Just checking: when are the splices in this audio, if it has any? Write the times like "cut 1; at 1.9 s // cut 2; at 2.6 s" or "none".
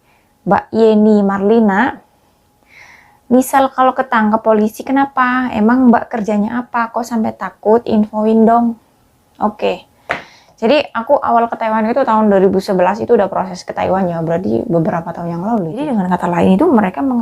cut 1; at 15.9 s